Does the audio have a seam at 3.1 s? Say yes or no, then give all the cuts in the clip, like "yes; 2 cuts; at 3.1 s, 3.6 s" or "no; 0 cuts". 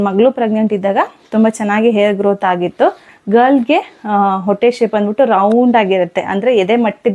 yes; 1 cut; at 3.1 s